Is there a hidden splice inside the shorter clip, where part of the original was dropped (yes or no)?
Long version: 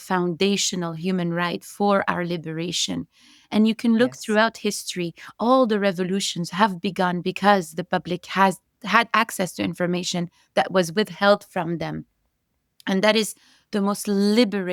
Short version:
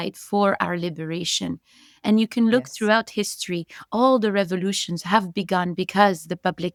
no